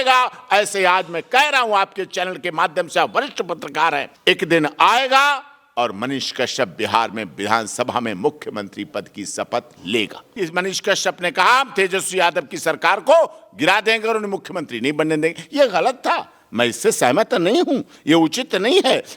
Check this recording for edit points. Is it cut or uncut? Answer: cut